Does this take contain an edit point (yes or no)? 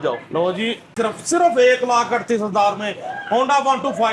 yes